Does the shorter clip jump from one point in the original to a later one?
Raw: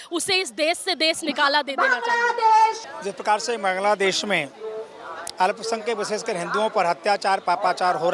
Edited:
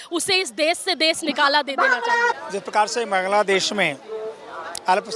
yes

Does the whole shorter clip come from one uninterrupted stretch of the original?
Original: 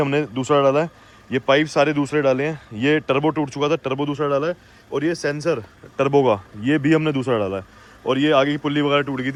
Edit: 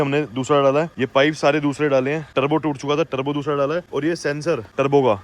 no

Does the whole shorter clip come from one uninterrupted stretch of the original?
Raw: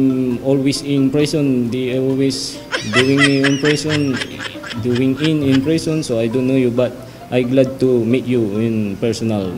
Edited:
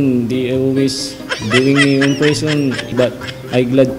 no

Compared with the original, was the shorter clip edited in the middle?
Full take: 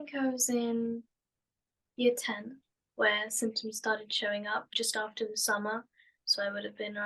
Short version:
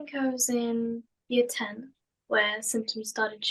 yes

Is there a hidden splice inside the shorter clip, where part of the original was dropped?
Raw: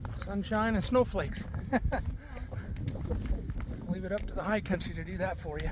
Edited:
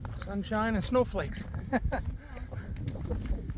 no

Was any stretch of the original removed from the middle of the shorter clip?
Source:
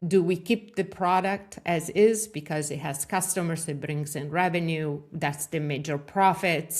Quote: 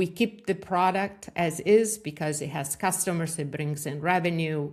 no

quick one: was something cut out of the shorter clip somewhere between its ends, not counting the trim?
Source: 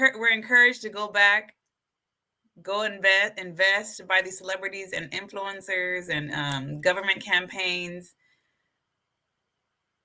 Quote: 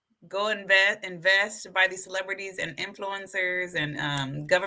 no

